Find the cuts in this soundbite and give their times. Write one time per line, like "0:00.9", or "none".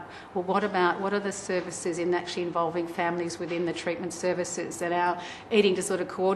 0:04.9